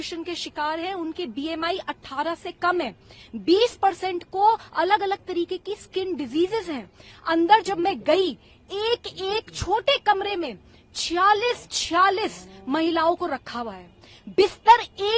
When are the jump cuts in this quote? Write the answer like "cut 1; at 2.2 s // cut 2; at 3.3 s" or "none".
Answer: none